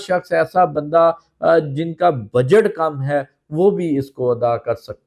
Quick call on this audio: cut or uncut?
uncut